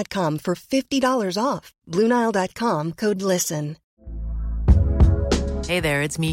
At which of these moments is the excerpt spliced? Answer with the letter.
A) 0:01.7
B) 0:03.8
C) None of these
B